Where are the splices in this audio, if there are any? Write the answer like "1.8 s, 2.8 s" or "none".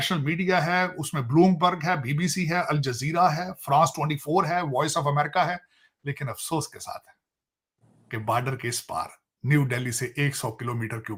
none